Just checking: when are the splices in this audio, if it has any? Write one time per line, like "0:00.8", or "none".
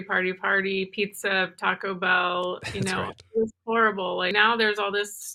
0:04.3